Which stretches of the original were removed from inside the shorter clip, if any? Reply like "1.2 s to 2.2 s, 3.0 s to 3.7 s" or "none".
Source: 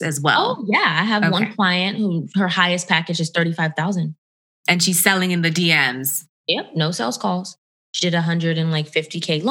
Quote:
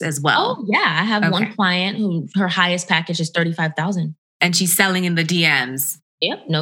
4.2 s to 4.5 s